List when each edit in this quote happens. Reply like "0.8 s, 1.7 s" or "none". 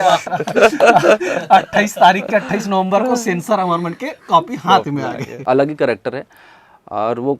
5.4 s